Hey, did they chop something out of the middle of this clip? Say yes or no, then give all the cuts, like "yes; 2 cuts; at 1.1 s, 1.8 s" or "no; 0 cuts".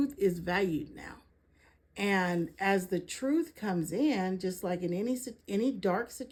no; 0 cuts